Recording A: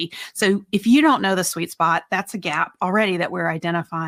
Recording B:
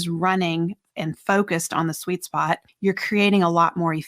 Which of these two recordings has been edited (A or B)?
B